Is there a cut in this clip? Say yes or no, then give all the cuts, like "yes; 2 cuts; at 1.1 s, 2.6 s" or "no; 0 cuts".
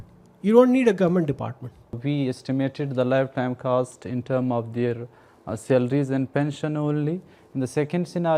yes; 1 cut; at 2.0 s